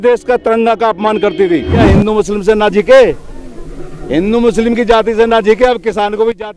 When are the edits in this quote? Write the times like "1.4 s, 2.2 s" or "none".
1.8 s

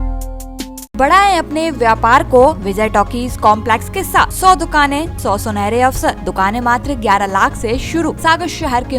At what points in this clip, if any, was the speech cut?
0.9 s, 2.6 s, 4.3 s, 5.1 s, 6.2 s, 8.2 s

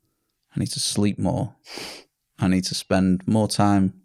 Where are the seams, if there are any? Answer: none

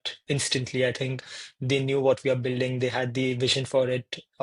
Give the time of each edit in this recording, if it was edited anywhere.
none

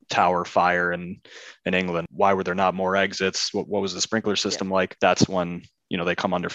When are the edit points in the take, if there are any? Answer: 2.1 s, 4.9 s

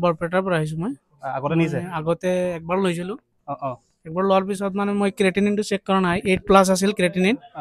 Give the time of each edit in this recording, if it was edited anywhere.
none

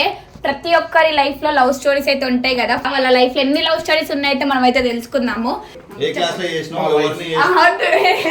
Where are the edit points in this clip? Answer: 2.8 s, 5.7 s

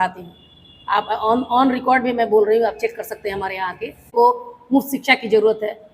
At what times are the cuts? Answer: 4.1 s

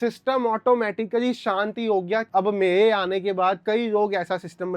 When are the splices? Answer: 2.3 s

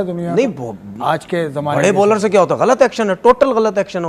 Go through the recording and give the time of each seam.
3.2 s

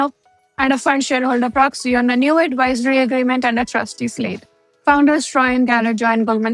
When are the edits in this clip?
none

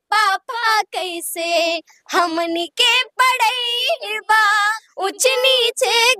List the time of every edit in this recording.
4.8 s

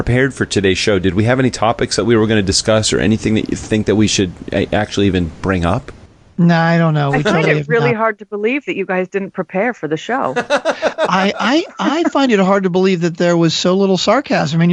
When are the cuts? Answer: none

